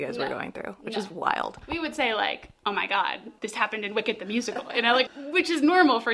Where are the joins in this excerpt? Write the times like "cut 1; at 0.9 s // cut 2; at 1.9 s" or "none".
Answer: cut 1; at 3.3 s // cut 2; at 5.1 s